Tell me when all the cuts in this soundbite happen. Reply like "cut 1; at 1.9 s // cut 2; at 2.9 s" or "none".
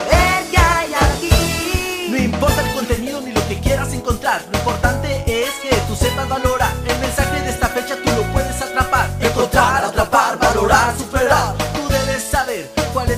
none